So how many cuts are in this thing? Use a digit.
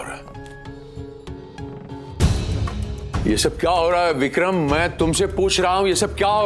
0